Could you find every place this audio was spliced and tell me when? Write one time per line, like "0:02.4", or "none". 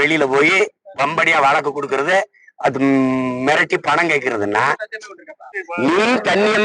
0:05.6